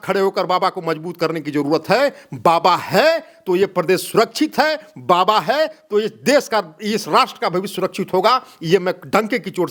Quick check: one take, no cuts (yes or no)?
yes